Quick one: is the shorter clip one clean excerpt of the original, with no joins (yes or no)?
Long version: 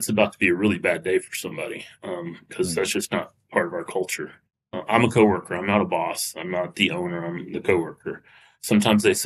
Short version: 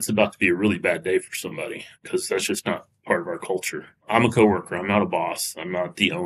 no